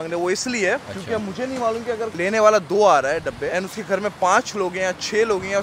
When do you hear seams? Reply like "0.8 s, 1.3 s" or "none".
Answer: 2.1 s, 3.5 s